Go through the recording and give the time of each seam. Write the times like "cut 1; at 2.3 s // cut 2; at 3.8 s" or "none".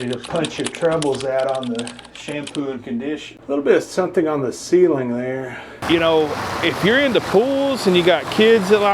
cut 1; at 3.3 s // cut 2; at 5.7 s